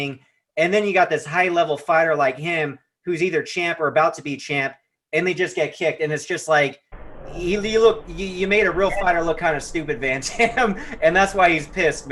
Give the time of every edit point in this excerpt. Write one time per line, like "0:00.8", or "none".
none